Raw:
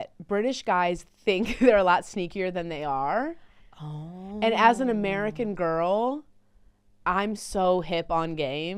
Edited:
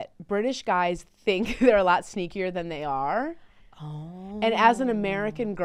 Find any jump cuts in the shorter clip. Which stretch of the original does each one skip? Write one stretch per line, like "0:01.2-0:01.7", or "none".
none